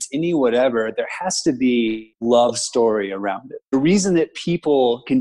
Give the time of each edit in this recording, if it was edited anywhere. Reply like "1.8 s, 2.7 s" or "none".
2.1 s, 3.7 s